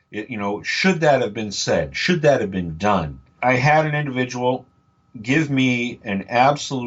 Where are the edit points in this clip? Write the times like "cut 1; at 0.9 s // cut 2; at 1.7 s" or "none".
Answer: cut 1; at 3.4 s